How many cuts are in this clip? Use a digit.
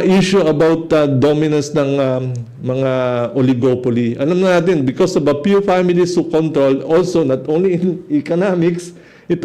0